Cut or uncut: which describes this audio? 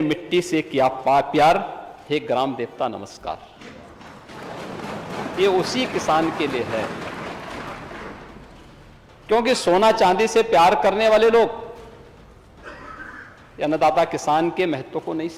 uncut